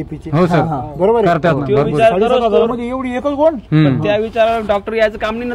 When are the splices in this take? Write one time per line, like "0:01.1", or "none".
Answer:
none